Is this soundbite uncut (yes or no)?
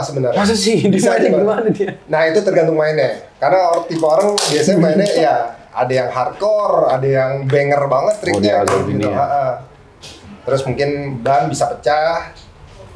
yes